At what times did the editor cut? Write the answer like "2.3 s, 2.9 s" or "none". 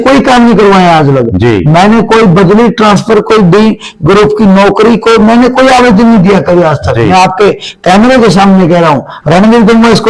none